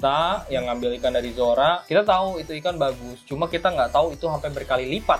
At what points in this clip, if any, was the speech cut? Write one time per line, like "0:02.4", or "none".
none